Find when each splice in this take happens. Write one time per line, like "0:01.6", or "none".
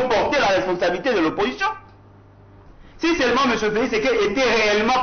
0:02.5